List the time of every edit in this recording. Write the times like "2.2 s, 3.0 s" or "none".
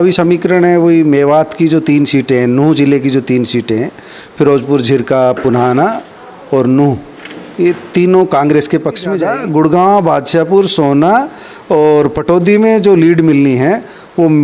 9.2 s